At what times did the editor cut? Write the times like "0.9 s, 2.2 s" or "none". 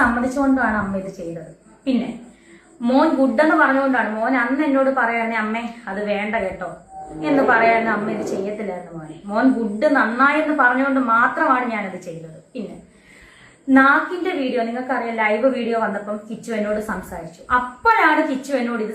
none

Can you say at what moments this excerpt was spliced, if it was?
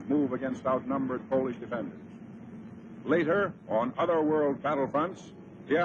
none

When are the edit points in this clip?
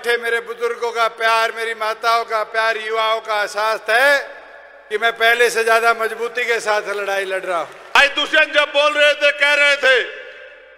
7.8 s

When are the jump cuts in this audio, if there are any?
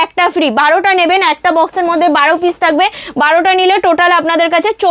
none

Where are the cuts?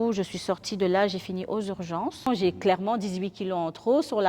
2.3 s

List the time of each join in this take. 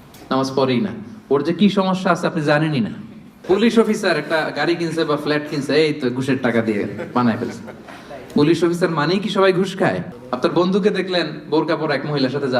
3.4 s, 10.1 s

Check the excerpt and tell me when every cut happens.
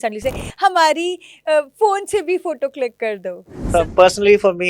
3.7 s

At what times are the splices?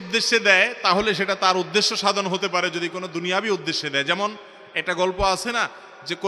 none

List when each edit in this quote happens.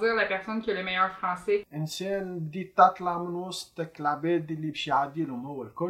1.7 s

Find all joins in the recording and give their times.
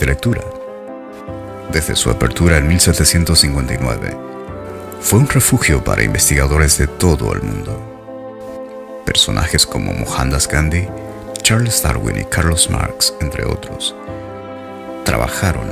none

